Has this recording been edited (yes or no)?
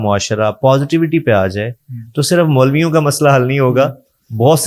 no